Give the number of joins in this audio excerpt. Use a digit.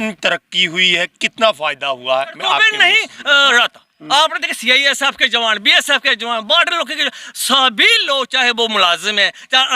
1